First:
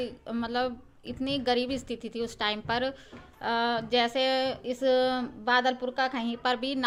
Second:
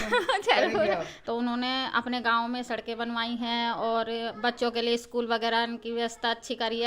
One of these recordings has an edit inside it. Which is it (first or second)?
second